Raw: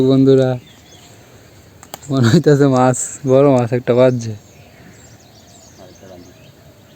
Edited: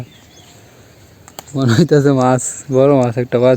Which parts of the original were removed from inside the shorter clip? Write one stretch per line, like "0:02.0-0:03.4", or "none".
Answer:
none